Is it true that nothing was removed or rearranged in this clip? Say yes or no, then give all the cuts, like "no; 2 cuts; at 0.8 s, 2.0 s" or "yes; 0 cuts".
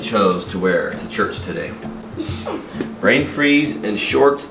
yes; 0 cuts